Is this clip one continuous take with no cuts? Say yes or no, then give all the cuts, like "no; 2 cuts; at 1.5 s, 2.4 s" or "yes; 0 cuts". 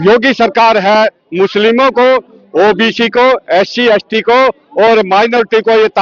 yes; 0 cuts